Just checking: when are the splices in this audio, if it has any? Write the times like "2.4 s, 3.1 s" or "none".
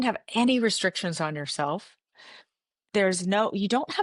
none